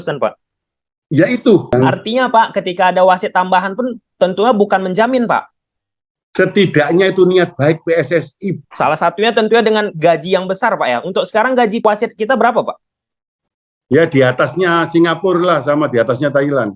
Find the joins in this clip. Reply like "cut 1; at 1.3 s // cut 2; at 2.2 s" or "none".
cut 1; at 1.7 s // cut 2; at 8.6 s